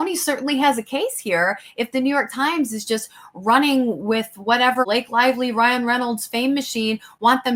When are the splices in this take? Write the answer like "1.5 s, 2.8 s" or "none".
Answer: none